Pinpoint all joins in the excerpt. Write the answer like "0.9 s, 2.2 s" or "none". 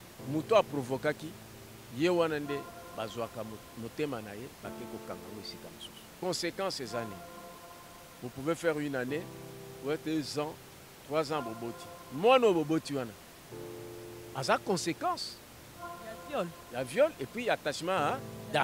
6.0 s